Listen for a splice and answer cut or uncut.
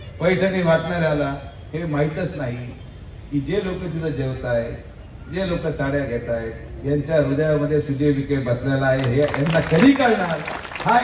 uncut